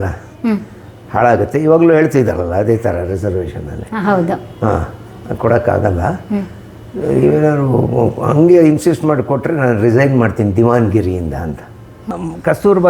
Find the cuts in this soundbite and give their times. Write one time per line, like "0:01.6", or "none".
0:12.0

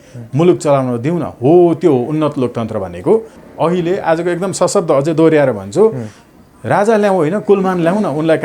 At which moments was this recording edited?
0:03.4

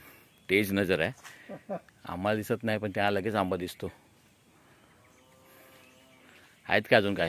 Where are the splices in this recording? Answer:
none

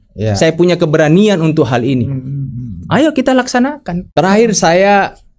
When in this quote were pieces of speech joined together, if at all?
0:03.9

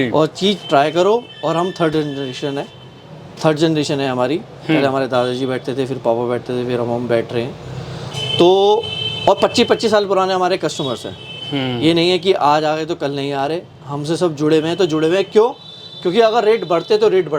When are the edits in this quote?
none

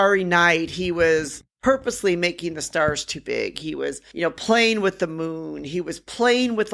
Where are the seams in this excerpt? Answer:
0:04.0

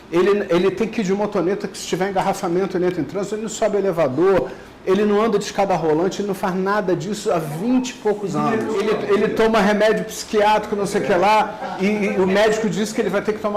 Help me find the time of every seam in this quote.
none

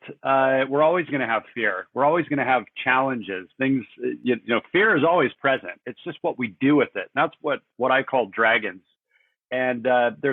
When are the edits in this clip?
none

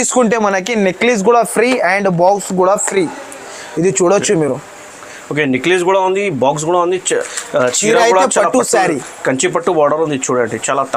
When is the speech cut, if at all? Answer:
none

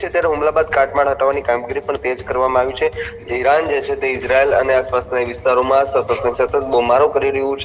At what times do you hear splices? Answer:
0:03.2

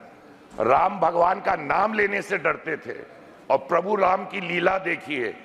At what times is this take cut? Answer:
none

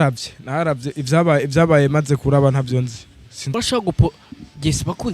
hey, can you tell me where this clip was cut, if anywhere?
0:03.5

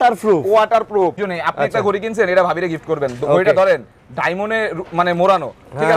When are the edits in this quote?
0:01.2

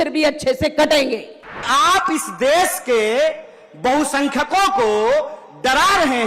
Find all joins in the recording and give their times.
0:01.7

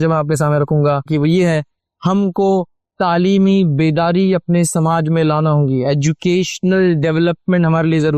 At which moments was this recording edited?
0:01.1

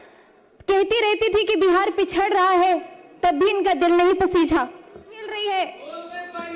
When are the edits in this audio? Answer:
0:05.3

